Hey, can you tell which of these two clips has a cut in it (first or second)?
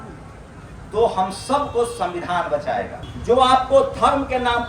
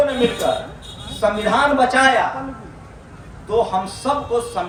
first